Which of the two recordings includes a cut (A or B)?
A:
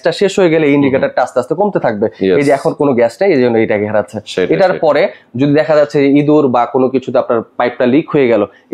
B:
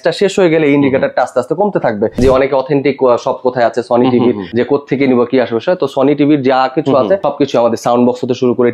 B